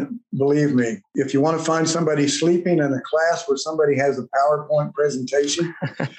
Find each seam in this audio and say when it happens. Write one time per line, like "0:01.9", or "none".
0:01.0